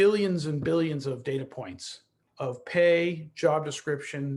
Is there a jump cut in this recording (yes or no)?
no